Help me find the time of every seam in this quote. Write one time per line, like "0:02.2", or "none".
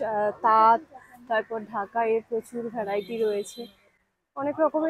none